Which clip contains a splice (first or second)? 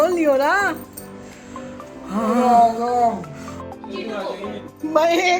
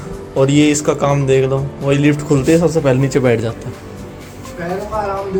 first